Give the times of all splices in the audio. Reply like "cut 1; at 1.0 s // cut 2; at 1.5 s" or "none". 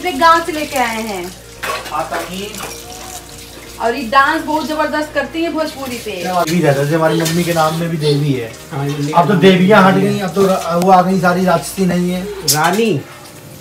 cut 1; at 6.5 s